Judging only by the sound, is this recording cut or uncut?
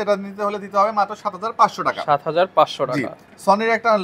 uncut